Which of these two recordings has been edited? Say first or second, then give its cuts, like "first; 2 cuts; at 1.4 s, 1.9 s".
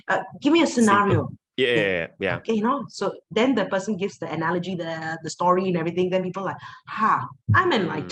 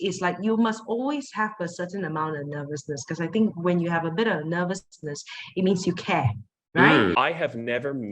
second; 1 cut; at 7.1 s